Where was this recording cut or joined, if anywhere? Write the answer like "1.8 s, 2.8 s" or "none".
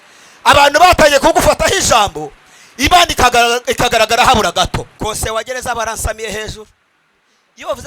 4.9 s